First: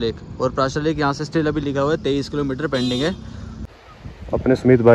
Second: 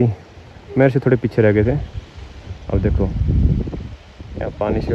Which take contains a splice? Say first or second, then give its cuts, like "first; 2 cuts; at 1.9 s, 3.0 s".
first; 1 cut; at 3.5 s